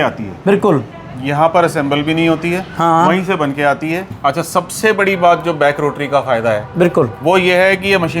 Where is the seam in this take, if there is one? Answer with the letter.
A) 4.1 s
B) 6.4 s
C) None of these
A